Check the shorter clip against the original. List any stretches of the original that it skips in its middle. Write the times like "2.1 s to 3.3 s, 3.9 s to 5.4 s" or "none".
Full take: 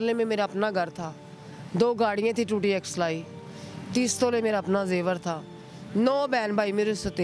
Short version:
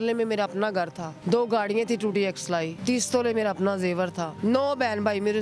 1.1 s to 1.6 s, 3.2 s to 3.8 s, 5.3 s to 5.8 s

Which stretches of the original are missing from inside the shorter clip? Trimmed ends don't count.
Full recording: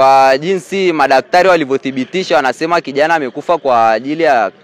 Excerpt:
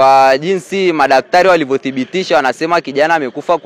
none

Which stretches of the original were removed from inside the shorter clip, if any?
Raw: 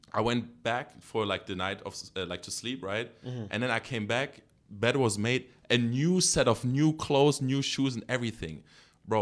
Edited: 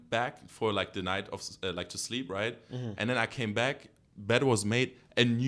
none

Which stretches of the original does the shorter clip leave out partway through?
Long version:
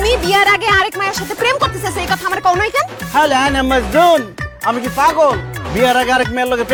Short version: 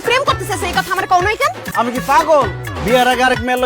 2.9 s to 4.5 s

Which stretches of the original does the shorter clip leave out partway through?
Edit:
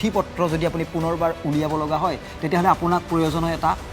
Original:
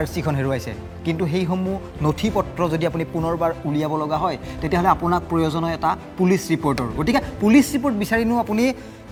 none

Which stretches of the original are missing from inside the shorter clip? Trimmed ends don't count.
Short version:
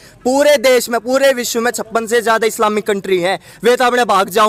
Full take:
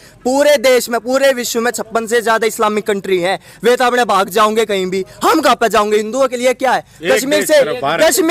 none

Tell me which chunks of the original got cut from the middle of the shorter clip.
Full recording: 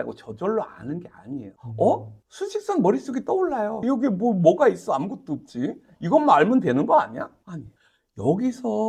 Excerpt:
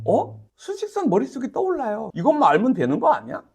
3.8 s to 5.9 s

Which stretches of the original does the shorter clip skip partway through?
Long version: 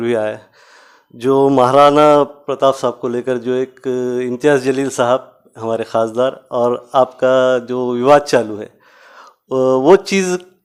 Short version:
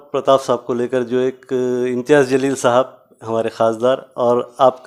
none

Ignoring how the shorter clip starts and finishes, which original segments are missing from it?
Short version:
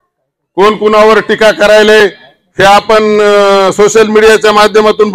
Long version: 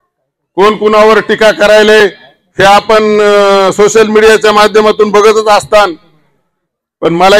none

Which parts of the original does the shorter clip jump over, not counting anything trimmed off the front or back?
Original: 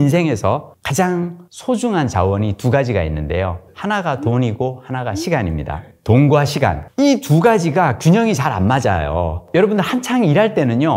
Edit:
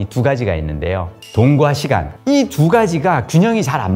3.7 s to 5.9 s

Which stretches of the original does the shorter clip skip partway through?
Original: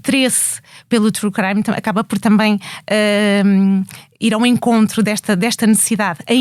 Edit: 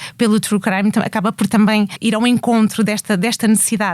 2.7 s to 4.1 s

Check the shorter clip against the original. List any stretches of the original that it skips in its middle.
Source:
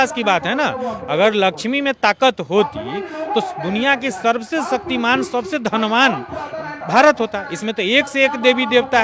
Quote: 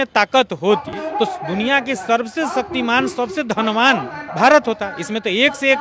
2.8 s to 3.1 s, 6.3 s to 6.7 s

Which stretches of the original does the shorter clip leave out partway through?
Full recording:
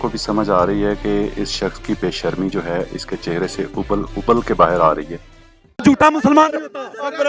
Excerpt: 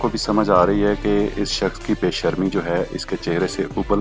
none

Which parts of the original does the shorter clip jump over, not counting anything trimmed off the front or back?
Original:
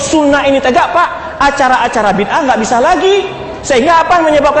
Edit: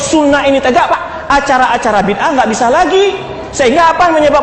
0.9 s to 1.1 s

